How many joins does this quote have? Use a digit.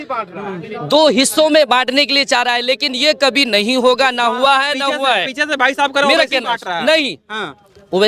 0